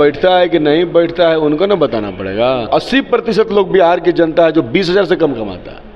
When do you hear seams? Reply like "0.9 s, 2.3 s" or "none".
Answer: 2.7 s